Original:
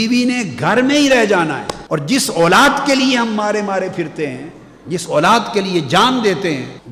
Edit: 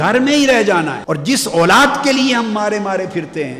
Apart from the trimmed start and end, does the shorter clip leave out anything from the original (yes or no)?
yes